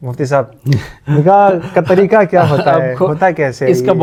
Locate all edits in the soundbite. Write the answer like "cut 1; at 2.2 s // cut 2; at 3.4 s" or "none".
none